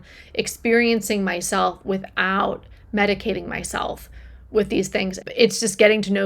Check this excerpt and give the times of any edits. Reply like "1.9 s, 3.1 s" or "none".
5.2 s